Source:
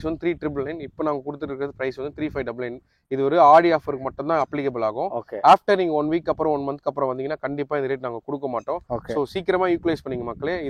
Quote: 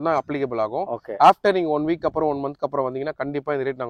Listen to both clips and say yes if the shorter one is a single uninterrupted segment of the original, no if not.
yes